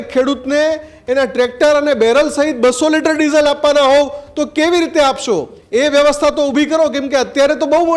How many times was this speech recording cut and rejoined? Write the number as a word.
one